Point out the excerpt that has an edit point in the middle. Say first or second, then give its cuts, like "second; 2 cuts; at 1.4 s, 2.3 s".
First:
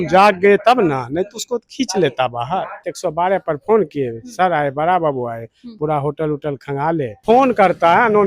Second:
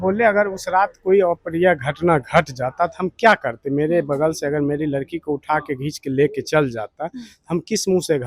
first; 2 cuts; at 2.9 s, 7.2 s